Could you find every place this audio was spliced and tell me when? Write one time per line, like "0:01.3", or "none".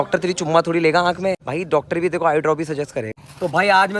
0:01.5
0:03.2